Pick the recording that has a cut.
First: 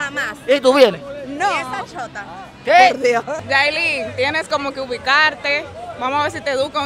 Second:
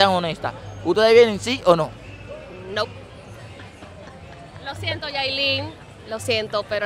first; 1 cut; at 3.3 s

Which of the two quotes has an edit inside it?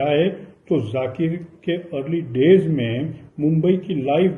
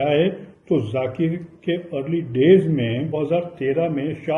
second; 1 cut; at 3.1 s

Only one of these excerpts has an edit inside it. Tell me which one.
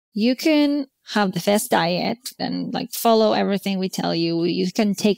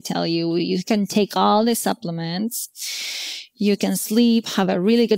first; 2 cuts; at 0.9 s, 2.4 s

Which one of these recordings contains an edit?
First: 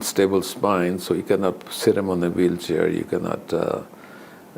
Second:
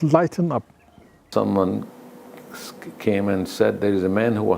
second; 1 cut; at 1.3 s

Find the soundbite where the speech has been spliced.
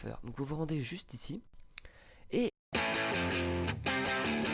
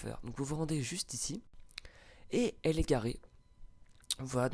second; 1 cut; at 2.6 s

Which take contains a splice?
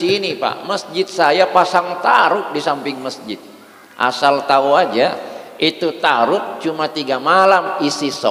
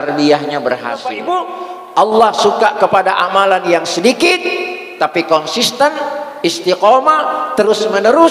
second; 1 cut; at 1.2 s

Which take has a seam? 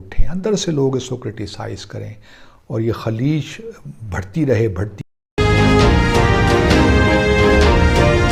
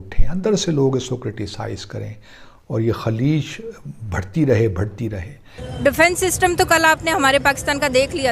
second; 1 cut; at 5.2 s

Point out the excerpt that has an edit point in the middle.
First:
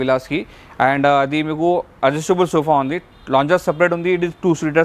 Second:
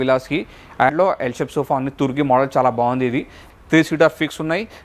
second; 2 cuts; at 0.9 s, 3.4 s

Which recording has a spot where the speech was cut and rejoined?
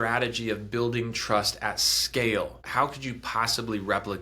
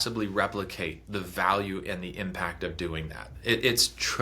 first; 1 cut; at 2.6 s

